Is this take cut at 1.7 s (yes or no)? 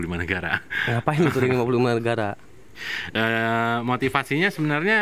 no